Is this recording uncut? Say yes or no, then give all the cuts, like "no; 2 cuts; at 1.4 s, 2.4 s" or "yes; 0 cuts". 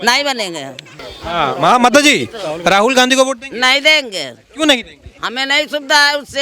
no; 1 cut; at 1.0 s